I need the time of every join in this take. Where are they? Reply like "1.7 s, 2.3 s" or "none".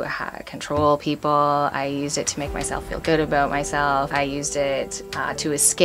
4.1 s